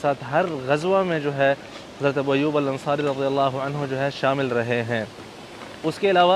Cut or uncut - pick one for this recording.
uncut